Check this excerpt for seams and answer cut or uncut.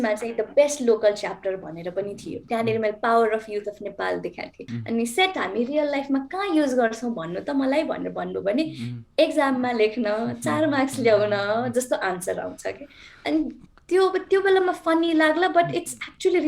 cut